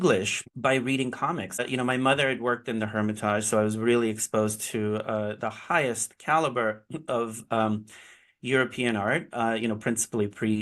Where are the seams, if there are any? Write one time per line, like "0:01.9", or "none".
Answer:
0:01.6